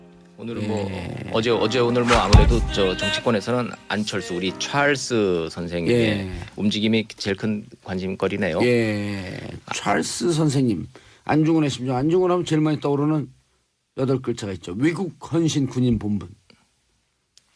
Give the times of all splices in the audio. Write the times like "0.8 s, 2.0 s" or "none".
none